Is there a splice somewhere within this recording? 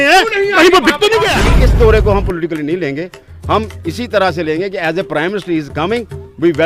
yes; 1 cut; at 1.4 s

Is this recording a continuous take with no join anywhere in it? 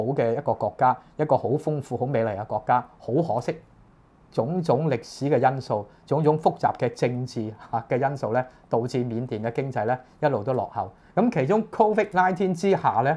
yes; 0 cuts

